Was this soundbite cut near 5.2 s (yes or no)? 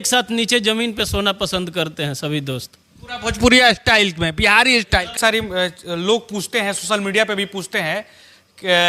yes